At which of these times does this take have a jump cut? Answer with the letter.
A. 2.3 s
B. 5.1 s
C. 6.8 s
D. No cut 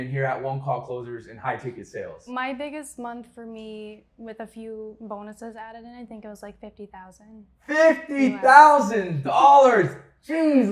A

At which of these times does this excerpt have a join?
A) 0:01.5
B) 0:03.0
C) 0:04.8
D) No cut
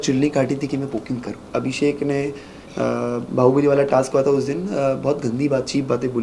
A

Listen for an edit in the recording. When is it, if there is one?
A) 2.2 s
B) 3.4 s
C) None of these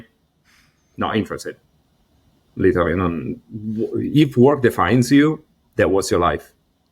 C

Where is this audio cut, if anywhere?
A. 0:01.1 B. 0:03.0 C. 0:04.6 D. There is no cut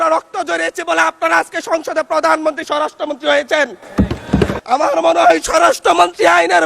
C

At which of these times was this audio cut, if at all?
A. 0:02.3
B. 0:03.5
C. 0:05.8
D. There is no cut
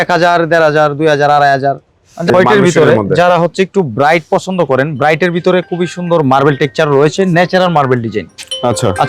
A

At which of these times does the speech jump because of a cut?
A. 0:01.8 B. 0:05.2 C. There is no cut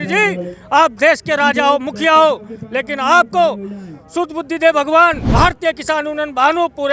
B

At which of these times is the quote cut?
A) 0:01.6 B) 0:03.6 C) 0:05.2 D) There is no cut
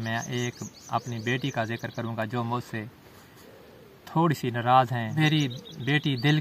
C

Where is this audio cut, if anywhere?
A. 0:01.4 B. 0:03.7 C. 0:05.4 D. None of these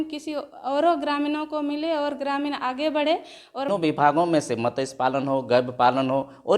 B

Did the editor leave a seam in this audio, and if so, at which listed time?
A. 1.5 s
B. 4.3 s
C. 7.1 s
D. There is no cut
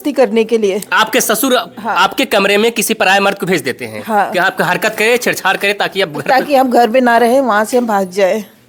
D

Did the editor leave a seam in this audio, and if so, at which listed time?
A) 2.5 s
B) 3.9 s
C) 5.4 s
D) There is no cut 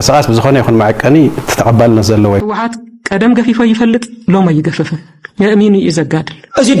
A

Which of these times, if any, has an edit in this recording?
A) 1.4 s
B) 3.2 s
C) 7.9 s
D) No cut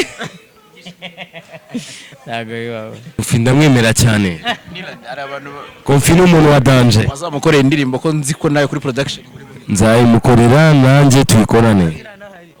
B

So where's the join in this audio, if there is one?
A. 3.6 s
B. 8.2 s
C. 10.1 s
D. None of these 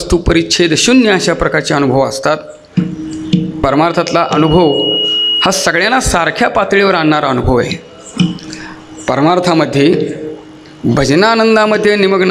A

